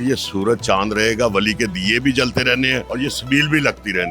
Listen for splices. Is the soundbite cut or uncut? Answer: cut